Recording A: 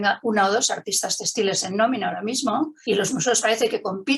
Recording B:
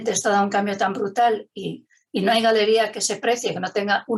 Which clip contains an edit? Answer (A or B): A